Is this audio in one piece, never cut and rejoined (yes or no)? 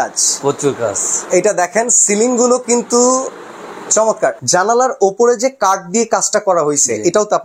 no